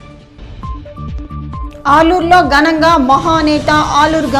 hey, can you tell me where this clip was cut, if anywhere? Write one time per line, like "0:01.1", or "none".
0:01.7